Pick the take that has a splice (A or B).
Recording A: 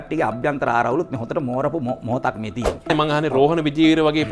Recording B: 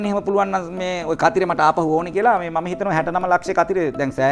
A